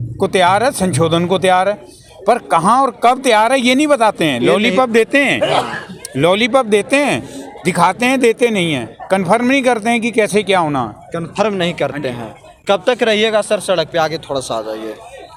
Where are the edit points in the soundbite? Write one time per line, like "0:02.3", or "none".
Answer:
none